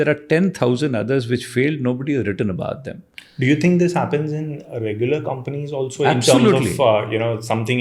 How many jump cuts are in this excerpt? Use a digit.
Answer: 0